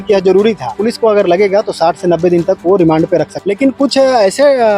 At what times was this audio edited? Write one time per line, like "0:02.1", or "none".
0:00.8
0:03.4